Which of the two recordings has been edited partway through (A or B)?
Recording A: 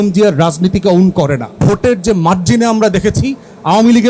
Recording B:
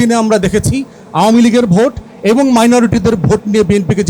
A